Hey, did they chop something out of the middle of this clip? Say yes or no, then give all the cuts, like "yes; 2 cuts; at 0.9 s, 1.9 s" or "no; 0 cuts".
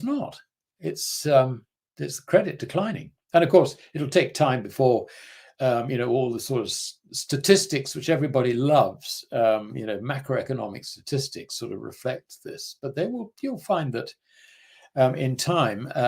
no; 0 cuts